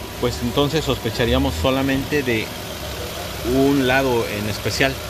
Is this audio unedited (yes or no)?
yes